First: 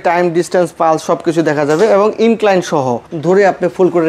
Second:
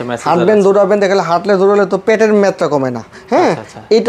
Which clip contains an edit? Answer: first; 1 cut; at 3.1 s

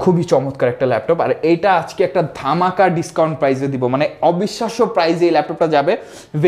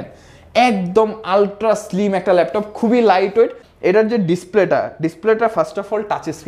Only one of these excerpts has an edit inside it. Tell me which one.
second; 1 cut; at 3.6 s

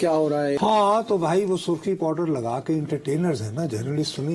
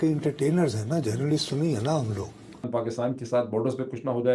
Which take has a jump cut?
second; 1 cut; at 2.7 s

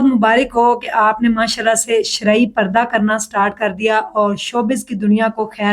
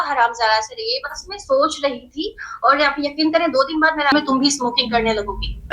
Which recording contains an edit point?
second; 1 cut; at 4.1 s

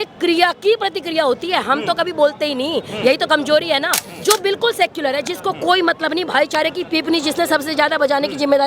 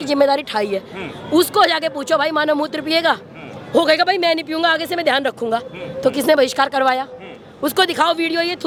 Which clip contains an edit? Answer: first; 1 cut; at 4.1 s

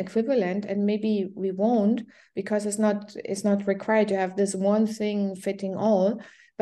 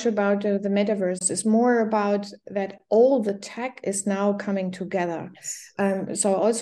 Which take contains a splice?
second; 1 cut; at 1.3 s

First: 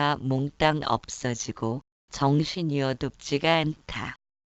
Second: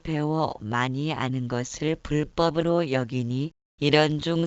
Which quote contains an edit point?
second; 1 cut; at 3.2 s

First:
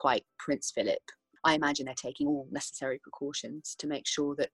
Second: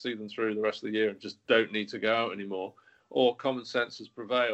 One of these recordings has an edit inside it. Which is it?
first; 1 cut; at 1.3 s

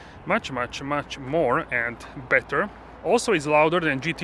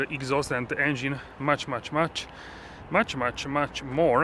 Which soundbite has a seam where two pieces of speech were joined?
first; 1 cut; at 2.8 s

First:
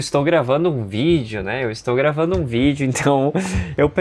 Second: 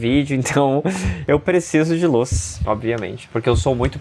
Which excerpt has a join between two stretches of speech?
second; 1 cut; at 2.5 s

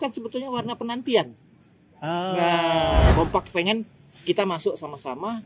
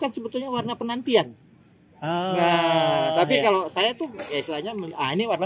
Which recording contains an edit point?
first; 1 cut; at 3.1 s

